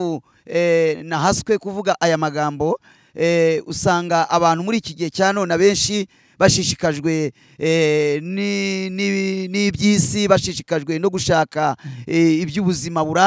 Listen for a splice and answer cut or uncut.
uncut